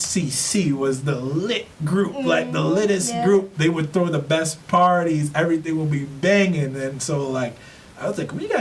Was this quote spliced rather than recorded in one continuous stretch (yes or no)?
no